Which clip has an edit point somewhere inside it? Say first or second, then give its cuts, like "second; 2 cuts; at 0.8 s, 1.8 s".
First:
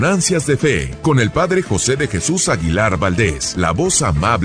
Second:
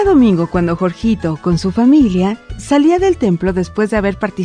first; 2 cuts; at 0.9 s, 3.4 s